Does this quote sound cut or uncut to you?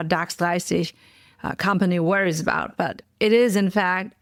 uncut